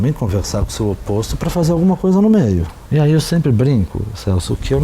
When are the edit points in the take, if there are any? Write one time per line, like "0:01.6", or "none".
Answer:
0:02.8

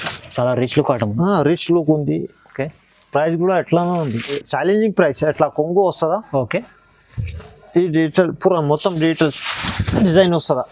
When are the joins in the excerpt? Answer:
0:04.4

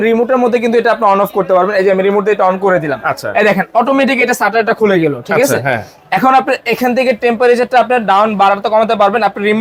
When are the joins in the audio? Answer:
none

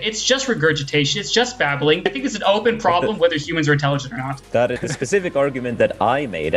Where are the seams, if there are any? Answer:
0:02.0
0:04.8

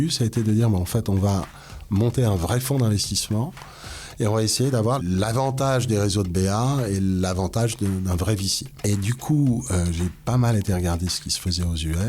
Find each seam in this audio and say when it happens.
0:05.0
0:08.6

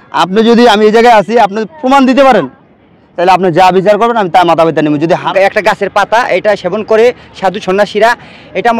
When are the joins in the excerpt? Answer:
0:05.2

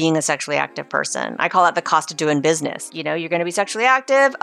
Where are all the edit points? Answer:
0:02.9

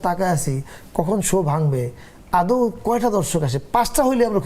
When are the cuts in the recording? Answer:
none

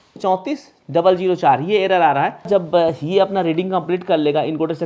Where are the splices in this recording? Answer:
0:02.5

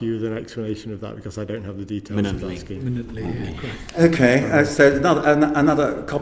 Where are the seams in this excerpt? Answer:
none

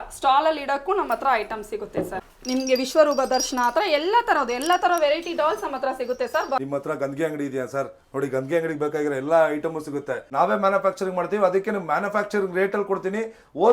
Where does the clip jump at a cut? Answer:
0:02.2
0:06.6
0:10.2

